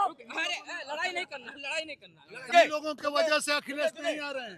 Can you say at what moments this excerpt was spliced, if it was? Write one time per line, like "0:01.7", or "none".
0:02.5